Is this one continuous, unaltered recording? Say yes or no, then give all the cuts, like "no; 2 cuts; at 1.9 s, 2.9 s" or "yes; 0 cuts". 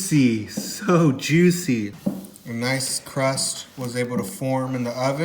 no; 1 cut; at 1.9 s